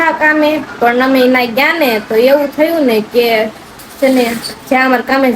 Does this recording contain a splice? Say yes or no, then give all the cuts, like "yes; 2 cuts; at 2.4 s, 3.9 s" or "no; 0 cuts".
no; 0 cuts